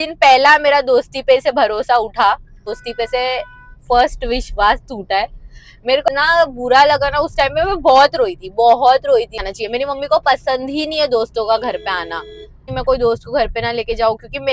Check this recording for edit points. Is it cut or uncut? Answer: cut